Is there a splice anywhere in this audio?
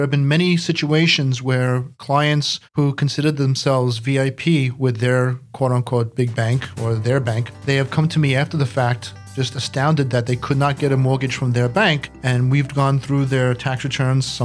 no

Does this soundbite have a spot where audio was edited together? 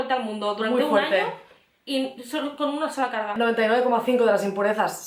yes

